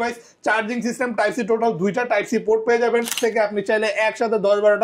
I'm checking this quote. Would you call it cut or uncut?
cut